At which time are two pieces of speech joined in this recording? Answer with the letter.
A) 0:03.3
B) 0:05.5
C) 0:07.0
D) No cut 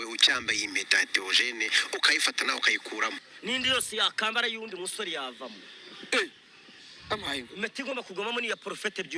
D